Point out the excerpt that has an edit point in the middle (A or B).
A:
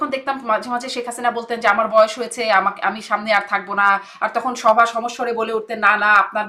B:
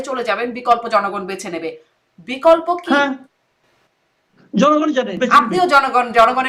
B